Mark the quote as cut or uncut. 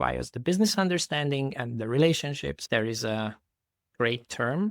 cut